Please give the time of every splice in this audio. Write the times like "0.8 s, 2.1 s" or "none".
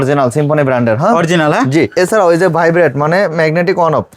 1.9 s